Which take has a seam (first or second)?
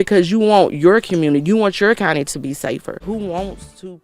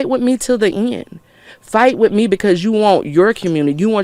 first